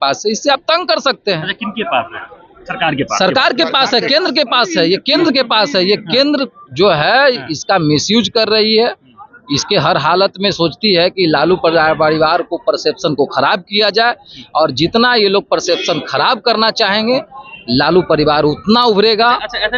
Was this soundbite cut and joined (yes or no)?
no